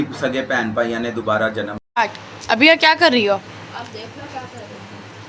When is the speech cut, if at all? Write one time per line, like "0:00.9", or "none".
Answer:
0:01.8